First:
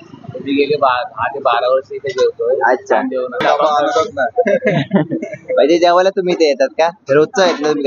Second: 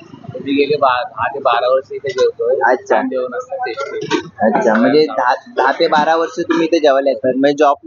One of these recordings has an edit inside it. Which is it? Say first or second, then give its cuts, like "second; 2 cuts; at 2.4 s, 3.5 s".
first; 1 cut; at 3.4 s